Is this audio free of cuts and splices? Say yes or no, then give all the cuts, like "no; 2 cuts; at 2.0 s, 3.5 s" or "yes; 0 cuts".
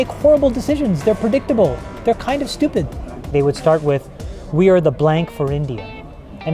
no; 1 cut; at 3.3 s